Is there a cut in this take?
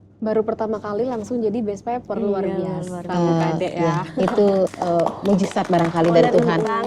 no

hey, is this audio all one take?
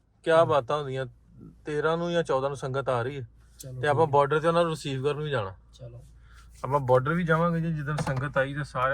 yes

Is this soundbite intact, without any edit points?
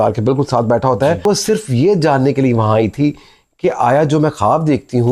no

